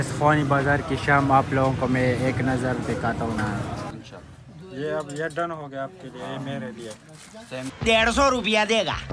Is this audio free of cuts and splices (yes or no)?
no